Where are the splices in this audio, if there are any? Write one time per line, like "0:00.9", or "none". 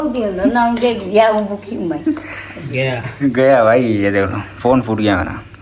none